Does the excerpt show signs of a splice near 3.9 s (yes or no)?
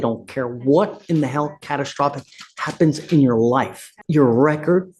yes